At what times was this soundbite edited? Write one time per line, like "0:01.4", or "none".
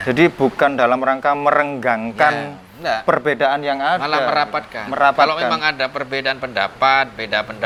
none